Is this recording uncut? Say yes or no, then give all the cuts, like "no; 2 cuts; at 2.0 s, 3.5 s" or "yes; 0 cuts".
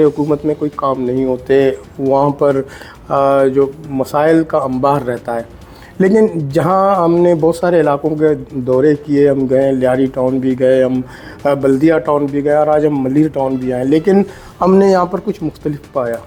yes; 0 cuts